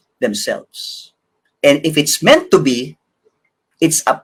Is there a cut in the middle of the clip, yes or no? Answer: no